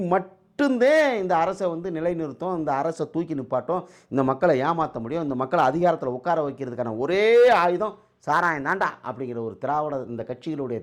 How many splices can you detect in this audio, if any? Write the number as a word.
zero